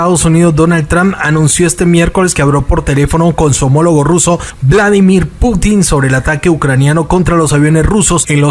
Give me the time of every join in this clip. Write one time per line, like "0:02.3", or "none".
none